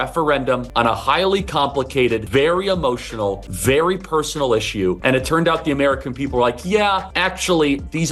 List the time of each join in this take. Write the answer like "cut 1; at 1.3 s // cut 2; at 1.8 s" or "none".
cut 1; at 0.9 s // cut 2; at 2.2 s // cut 3; at 3.5 s // cut 4; at 5.0 s // cut 5; at 7.1 s